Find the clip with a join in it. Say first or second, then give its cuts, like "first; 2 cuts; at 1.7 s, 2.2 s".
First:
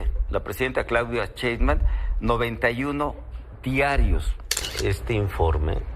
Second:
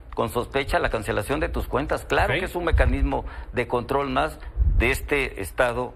first; 1 cut; at 4.6 s